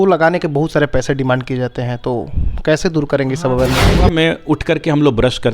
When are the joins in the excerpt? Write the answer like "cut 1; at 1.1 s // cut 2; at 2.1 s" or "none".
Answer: cut 1; at 4.1 s